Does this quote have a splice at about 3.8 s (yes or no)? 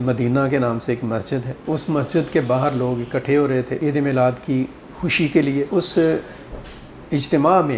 yes